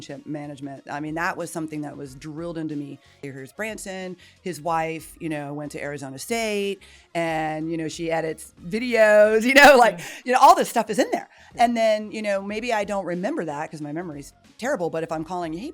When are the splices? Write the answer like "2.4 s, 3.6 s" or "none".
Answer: 3.2 s